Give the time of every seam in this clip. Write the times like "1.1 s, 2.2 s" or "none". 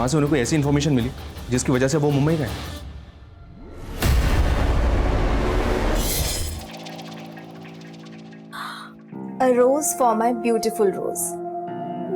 6.4 s